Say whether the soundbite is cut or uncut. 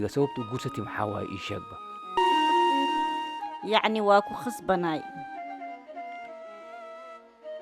cut